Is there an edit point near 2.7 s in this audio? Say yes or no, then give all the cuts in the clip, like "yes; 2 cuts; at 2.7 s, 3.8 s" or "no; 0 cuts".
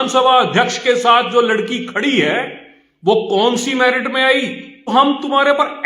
no; 1 cut; at 4.7 s